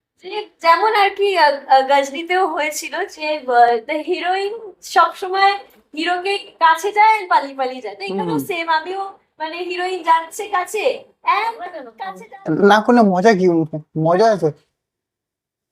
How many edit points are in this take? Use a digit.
1